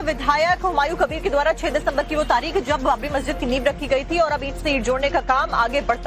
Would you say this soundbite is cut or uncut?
cut